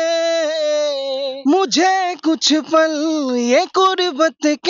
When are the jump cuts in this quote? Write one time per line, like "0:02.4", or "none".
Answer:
0:01.3